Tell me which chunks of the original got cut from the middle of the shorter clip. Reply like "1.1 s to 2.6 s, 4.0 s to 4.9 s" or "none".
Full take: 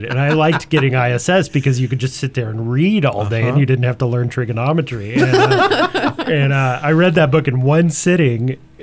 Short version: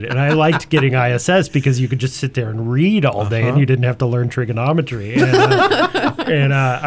none